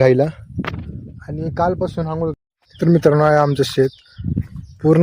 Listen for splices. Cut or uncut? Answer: cut